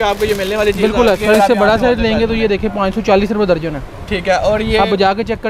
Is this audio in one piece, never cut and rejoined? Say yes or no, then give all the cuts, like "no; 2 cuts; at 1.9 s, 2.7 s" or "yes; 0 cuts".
no; 1 cut; at 1.2 s